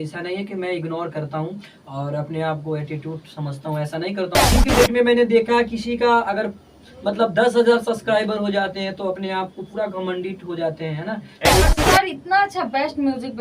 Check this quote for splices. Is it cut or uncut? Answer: cut